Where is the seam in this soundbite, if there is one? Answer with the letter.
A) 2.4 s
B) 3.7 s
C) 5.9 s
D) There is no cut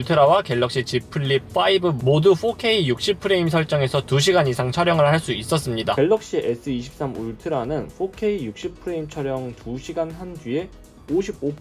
C